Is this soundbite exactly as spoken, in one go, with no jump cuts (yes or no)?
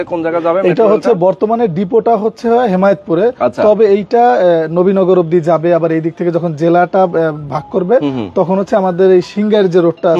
yes